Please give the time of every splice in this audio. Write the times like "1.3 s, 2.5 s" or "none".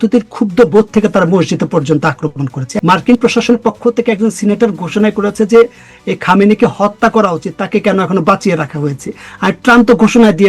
2.6 s